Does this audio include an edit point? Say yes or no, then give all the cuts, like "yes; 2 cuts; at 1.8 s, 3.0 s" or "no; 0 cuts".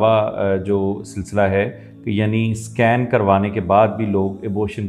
no; 0 cuts